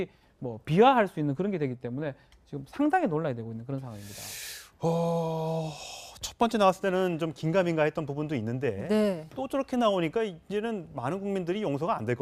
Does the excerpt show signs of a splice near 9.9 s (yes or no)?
no